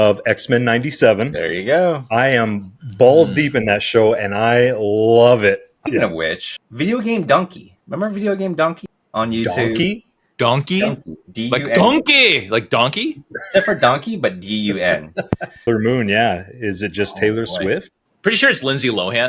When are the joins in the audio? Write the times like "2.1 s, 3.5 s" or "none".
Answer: 5.7 s, 15.7 s